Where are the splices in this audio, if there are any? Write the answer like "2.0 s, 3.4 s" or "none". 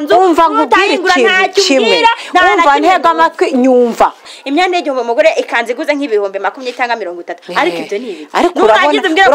4.4 s